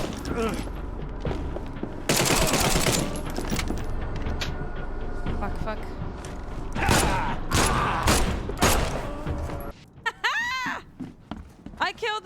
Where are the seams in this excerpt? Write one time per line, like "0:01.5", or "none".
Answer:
0:09.7

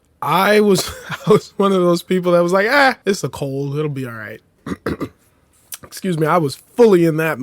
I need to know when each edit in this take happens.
0:03.0
0:04.5

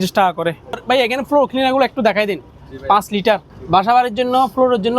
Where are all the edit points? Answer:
0:00.8
0:03.5

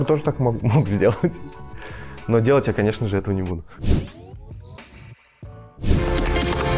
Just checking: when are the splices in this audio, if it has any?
none

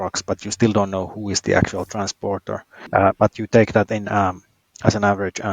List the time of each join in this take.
0:02.9

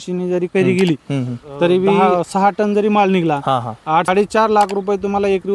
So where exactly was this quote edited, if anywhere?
0:02.0
0:04.1

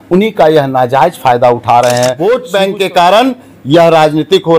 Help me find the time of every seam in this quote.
0:02.2

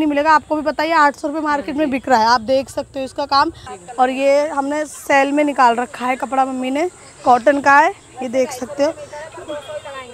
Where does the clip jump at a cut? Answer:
0:03.7

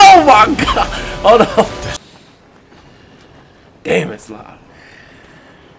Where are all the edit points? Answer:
0:01.8

